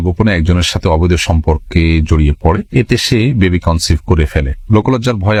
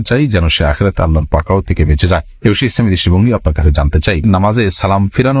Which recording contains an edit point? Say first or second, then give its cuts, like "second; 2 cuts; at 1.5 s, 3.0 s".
second; 1 cut; at 4.2 s